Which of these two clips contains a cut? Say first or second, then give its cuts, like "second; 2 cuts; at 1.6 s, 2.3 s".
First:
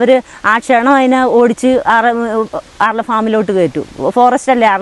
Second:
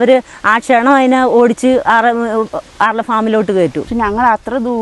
second; 1 cut; at 3.9 s